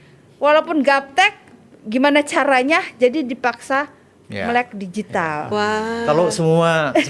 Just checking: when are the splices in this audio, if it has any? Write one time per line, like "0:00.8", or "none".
none